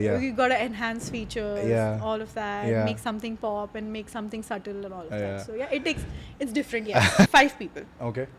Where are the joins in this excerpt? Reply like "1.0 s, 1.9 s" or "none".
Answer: 7.3 s